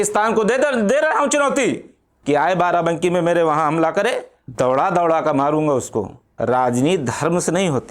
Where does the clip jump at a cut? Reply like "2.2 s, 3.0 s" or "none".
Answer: 4.4 s, 6.2 s